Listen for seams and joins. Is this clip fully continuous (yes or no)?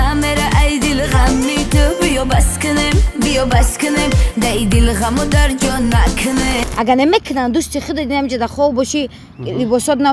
no